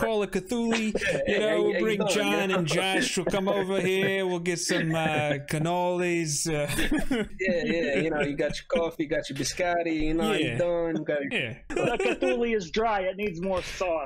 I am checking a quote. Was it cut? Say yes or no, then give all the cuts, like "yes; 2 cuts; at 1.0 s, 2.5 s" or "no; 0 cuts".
yes; 2 cuts; at 7.3 s, 11.7 s